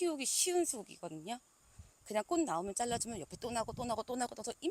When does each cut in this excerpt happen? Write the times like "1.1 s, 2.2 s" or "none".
none